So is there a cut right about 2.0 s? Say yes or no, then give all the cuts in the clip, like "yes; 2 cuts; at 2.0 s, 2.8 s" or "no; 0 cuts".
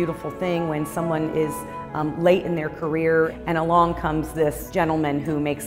no; 2 cuts; at 3.3 s, 4.6 s